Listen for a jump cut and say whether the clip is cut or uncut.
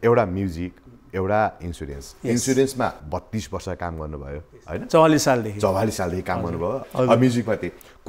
cut